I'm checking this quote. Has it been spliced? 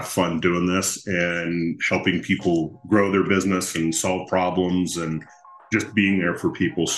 no; 0 cuts

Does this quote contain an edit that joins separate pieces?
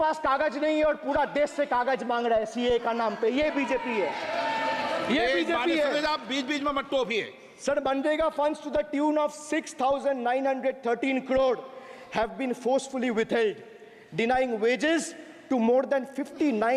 no; 0 cuts

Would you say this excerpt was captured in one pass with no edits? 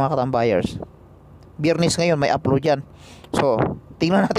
yes; 0 cuts

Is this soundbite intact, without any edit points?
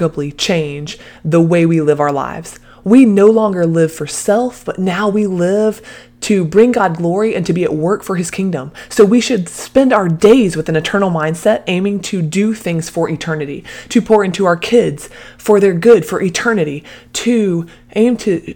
yes; 0 cuts

